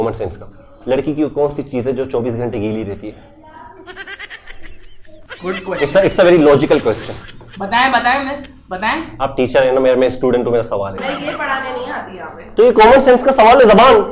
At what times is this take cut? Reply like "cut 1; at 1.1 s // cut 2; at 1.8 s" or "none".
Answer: cut 1; at 5.2 s // cut 2; at 11.0 s